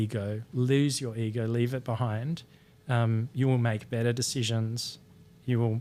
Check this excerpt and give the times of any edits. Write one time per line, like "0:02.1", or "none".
none

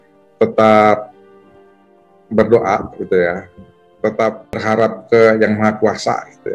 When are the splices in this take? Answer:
0:04.6

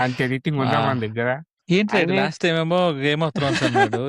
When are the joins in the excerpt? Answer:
0:01.5

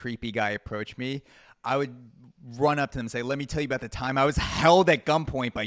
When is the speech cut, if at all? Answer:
none

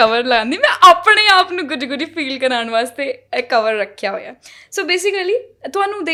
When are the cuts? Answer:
none

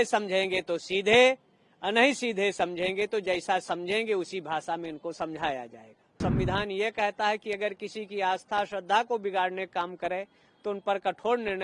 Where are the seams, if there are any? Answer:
0:06.2

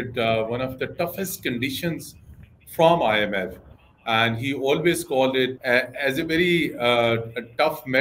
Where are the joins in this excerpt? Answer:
none

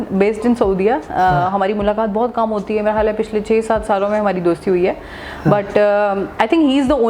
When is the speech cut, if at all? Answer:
none

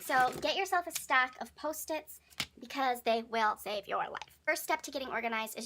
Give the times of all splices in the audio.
0:04.3

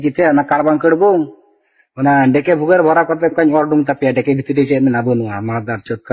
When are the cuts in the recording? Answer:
0:01.2

